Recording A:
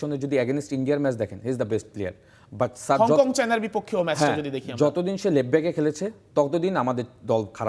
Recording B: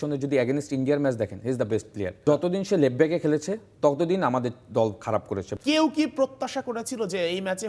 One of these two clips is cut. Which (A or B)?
B